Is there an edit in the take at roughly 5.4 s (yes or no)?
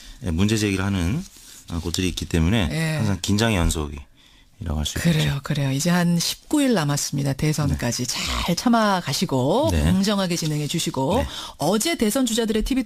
no